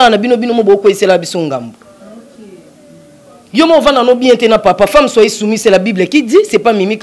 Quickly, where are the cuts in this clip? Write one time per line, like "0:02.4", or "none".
none